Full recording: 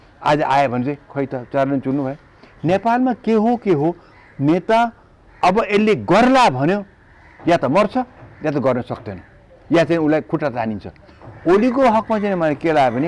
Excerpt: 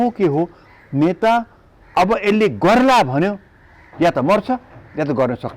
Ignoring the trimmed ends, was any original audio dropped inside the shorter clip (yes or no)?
no